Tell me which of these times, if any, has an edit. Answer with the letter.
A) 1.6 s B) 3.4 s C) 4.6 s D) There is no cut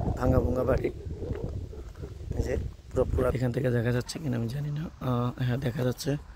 B